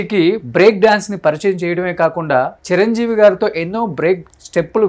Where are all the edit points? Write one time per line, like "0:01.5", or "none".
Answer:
none